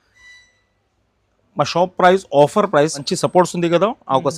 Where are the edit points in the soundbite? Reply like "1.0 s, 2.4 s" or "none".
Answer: 3.1 s